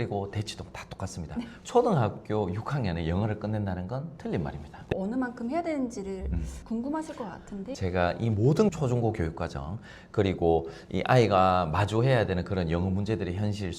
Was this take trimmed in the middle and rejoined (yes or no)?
yes